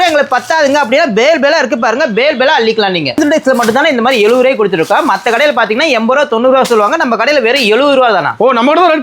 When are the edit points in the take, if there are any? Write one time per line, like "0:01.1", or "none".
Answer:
0:03.2